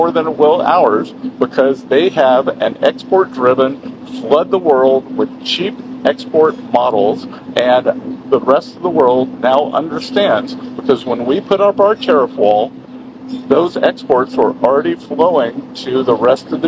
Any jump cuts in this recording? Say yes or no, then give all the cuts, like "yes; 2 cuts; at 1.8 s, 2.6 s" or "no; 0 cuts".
no; 0 cuts